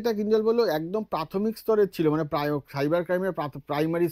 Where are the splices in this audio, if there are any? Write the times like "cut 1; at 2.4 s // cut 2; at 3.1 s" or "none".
none